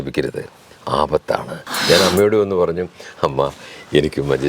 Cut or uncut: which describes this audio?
cut